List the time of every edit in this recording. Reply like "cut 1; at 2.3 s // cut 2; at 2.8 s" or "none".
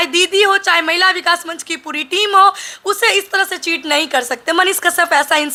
none